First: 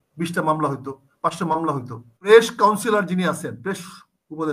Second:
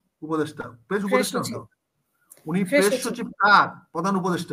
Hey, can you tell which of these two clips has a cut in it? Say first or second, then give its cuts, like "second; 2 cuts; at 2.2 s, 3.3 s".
first; 1 cut; at 2.3 s